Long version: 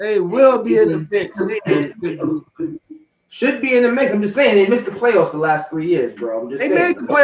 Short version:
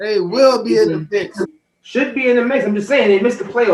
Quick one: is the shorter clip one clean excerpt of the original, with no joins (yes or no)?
no